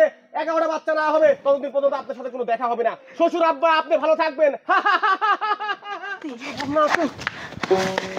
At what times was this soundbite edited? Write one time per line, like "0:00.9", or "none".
0:06.5